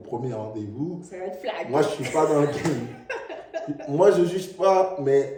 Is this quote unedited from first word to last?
yes; 0 cuts

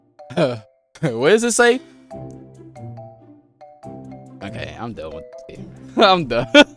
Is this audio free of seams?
yes; 0 cuts

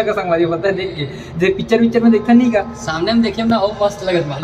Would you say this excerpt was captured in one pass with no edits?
yes; 0 cuts

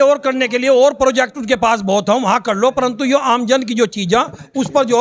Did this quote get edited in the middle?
no; 0 cuts

